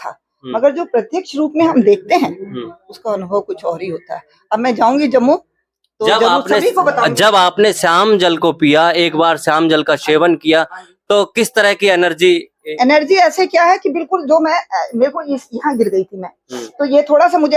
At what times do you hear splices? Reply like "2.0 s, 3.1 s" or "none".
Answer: none